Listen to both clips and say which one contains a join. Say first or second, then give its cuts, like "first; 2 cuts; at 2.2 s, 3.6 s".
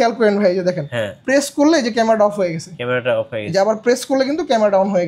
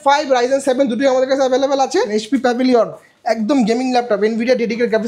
second; 1 cut; at 2.2 s